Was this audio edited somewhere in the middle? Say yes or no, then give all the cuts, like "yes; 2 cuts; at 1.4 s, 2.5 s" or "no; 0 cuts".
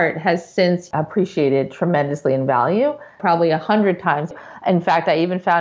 yes; 3 cuts; at 0.9 s, 3.2 s, 4.4 s